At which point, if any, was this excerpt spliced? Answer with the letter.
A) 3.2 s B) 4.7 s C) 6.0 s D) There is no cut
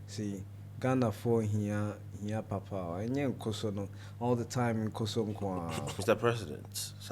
C